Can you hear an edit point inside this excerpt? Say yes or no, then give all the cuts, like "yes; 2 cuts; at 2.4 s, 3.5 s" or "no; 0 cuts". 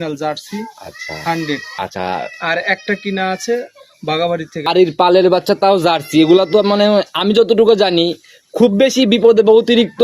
yes; 2 cuts; at 1.7 s, 4.6 s